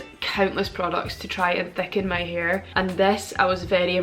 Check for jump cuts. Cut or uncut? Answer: uncut